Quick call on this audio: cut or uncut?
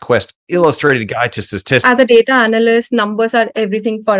cut